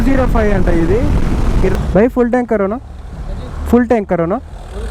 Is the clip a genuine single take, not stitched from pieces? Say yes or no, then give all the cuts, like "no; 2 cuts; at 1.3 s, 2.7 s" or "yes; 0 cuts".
no; 1 cut; at 1.7 s